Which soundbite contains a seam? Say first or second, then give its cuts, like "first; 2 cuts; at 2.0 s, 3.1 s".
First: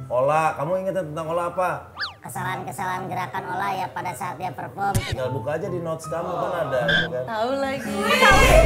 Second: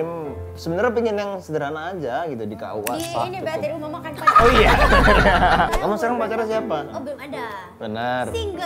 second; 2 cuts; at 5.7 s, 6.9 s